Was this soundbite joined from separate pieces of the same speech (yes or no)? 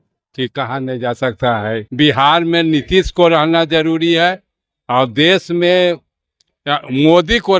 yes